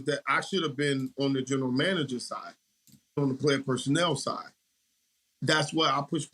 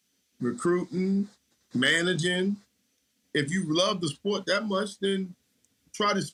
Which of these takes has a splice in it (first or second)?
first